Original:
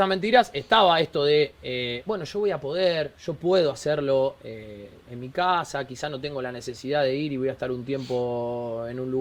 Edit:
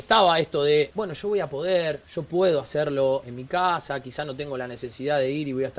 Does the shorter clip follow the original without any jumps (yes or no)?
no